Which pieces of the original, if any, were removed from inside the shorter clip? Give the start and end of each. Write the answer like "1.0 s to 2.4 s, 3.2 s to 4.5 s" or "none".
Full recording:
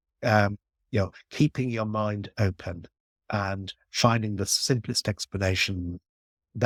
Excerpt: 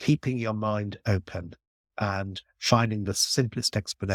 none